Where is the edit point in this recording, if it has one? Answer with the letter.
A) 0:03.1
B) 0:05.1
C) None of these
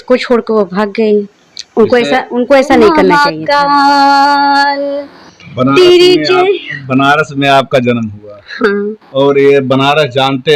A